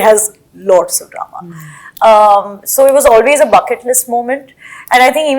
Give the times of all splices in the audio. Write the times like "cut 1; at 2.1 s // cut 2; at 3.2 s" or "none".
none